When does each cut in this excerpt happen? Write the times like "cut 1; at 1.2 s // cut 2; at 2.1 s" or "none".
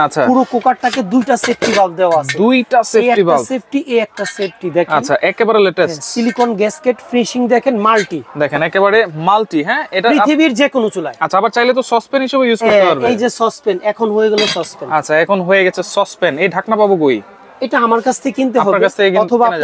none